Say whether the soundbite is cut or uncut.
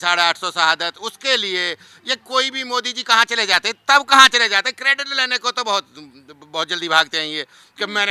uncut